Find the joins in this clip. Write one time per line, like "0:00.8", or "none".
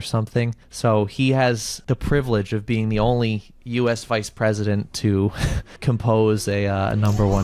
none